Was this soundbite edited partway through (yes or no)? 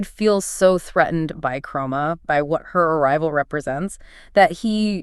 no